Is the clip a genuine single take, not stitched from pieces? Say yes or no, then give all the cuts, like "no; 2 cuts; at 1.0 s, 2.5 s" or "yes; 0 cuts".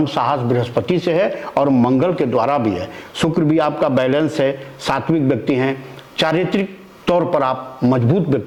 yes; 0 cuts